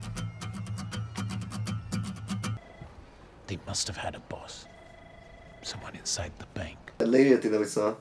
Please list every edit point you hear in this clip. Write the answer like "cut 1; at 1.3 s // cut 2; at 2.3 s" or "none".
cut 1; at 2.6 s // cut 2; at 7.0 s